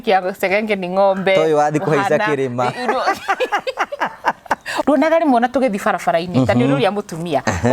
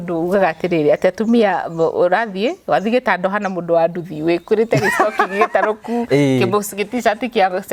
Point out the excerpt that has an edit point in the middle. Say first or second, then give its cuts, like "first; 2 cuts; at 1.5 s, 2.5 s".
first; 1 cut; at 4.7 s